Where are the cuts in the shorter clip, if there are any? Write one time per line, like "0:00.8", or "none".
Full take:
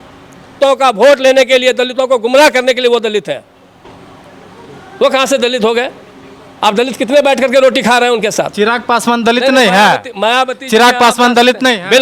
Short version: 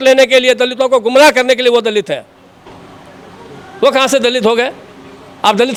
none